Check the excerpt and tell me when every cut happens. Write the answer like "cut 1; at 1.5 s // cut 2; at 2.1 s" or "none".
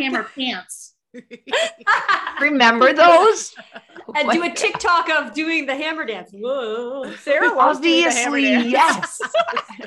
none

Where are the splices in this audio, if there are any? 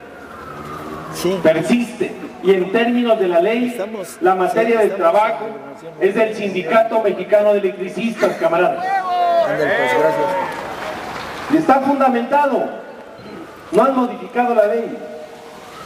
cut 1; at 4.9 s

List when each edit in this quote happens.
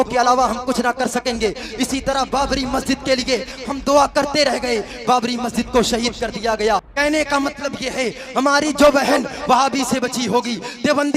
cut 1; at 6.9 s

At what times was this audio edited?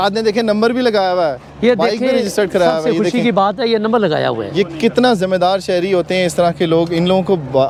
none

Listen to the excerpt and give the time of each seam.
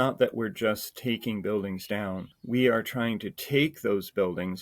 cut 1; at 2.3 s

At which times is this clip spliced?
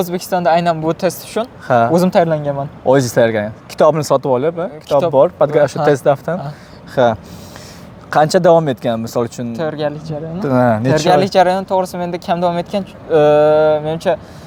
none

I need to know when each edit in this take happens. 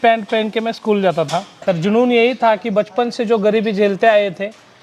cut 1; at 1.5 s

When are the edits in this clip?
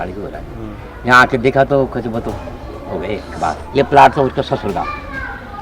cut 1; at 3.6 s

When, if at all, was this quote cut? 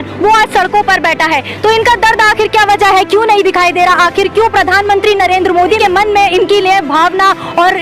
cut 1; at 5.8 s

